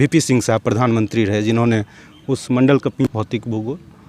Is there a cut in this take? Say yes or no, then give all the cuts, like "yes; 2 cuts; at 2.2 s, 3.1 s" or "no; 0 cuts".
yes; 1 cut; at 3.0 s